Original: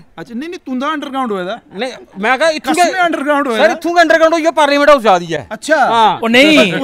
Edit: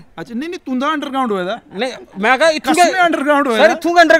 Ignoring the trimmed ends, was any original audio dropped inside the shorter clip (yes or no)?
no